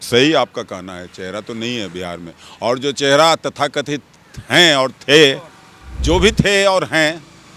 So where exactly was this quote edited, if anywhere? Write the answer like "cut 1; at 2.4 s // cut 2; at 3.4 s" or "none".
none